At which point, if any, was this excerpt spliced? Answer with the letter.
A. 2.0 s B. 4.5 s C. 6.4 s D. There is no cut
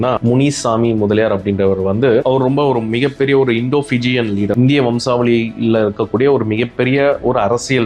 B